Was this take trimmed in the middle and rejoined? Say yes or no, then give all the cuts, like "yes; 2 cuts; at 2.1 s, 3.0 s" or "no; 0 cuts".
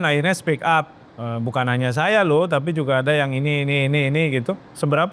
no; 0 cuts